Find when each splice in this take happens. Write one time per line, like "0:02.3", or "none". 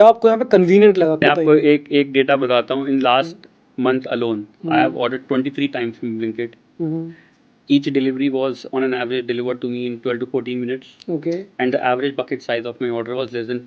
0:01.3